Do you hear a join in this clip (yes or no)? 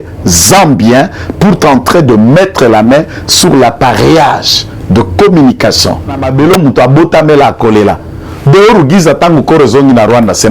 yes